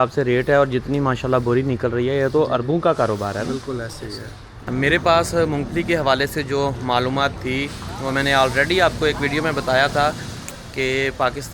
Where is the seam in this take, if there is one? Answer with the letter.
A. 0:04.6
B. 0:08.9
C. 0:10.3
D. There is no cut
A